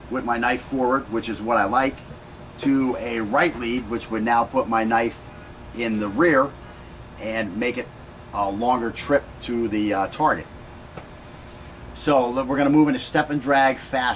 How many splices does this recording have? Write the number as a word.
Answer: one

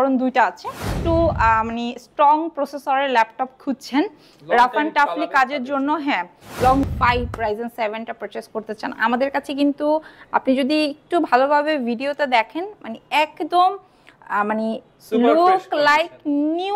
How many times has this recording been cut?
two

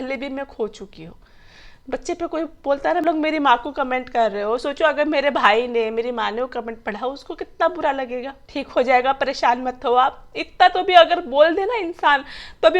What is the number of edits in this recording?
two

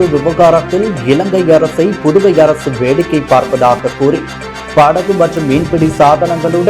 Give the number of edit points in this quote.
zero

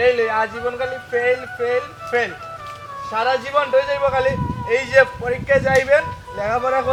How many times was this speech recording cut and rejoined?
zero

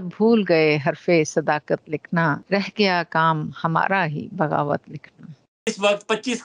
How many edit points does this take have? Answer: two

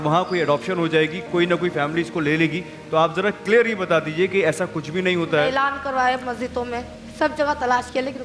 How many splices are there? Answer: one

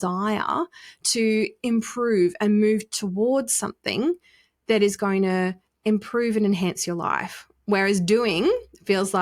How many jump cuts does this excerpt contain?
zero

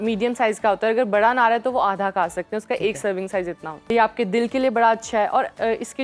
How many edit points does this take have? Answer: one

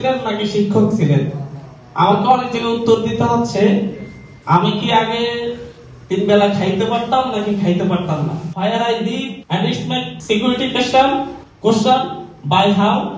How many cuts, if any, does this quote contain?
two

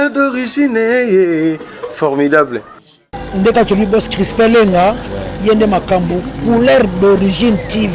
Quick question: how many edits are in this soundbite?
one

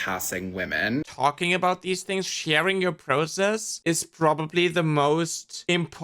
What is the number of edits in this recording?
one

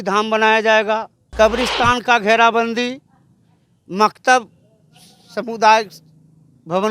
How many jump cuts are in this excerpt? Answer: one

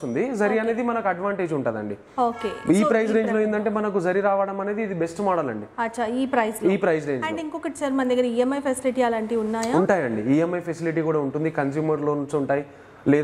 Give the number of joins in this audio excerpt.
zero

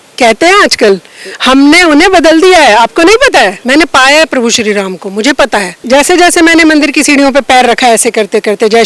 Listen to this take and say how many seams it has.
two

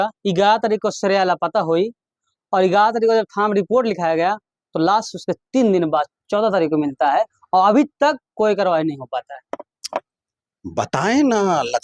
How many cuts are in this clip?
zero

